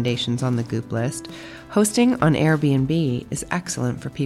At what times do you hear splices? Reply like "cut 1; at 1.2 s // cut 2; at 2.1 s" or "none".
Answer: none